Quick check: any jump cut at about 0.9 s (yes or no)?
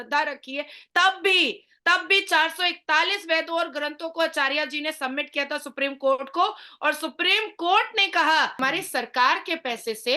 no